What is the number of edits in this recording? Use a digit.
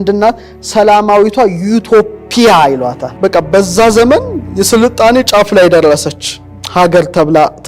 1